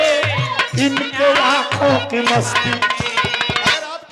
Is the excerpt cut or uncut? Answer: uncut